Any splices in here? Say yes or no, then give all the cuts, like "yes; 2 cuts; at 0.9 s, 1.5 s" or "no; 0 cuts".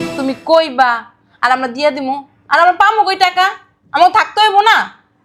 no; 0 cuts